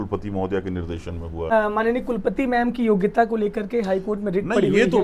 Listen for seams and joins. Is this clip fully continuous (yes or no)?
no